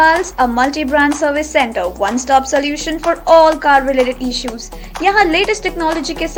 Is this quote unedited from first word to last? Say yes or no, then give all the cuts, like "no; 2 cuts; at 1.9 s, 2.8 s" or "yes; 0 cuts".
yes; 0 cuts